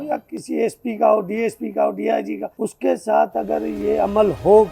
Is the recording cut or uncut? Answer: cut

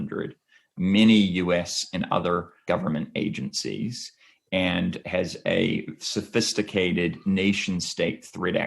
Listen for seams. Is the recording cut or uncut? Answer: cut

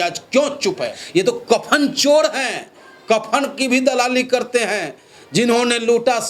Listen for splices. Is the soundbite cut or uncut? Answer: cut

